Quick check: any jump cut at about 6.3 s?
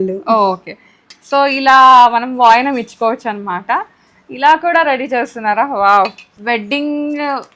yes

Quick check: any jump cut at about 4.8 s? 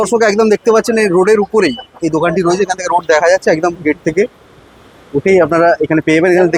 no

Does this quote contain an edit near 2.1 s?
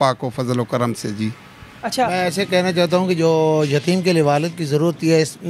yes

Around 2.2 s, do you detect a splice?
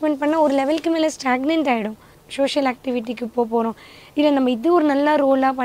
yes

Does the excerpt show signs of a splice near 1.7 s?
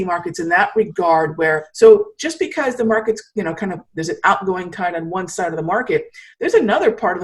yes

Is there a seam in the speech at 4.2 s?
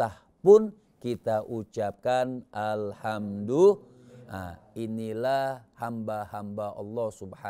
no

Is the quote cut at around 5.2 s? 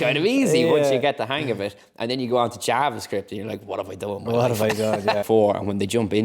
yes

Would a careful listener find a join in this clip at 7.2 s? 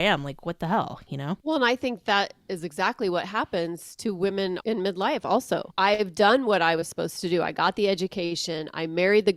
no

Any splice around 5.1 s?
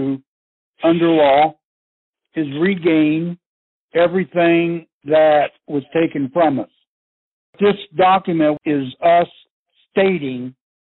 no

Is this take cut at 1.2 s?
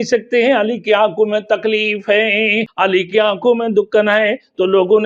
no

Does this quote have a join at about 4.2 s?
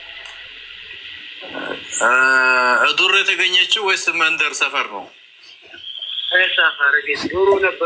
no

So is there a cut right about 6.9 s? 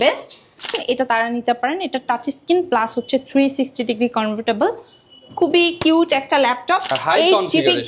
yes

